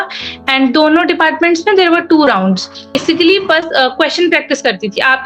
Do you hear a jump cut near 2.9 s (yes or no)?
yes